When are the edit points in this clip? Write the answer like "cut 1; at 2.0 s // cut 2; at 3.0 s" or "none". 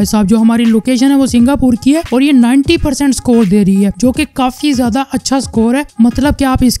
none